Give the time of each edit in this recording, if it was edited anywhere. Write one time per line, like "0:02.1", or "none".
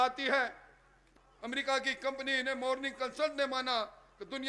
0:01.1